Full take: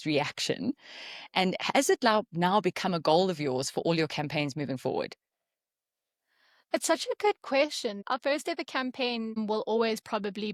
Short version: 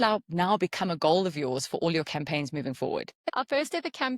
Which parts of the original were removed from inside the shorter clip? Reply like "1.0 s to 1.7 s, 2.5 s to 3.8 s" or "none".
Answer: 5.3 s to 8.0 s